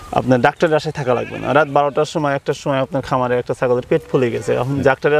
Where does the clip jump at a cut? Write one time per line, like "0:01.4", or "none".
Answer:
none